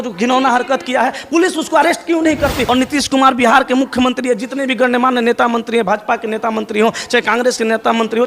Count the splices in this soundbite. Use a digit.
1